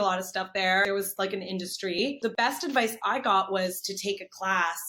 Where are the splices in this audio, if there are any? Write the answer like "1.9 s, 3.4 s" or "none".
0.8 s, 2.3 s